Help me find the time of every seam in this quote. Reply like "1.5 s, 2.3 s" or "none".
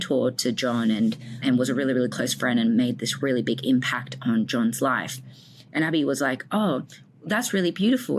1.4 s